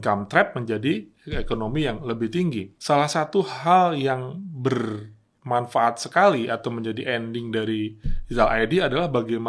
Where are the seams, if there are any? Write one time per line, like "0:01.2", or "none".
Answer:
0:02.7